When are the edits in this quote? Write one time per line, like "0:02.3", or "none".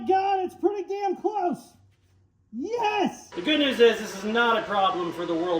0:03.3